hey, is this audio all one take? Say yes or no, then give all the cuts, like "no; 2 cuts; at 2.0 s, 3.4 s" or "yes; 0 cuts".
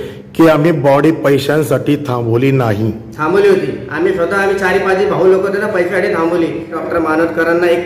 no; 1 cut; at 6.8 s